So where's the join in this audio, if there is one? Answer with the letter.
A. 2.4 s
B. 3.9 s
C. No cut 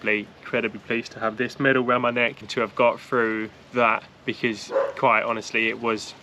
A